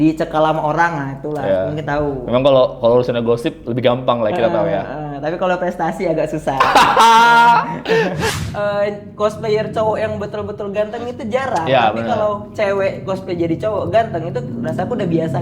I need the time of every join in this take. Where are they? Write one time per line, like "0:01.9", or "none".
0:08.3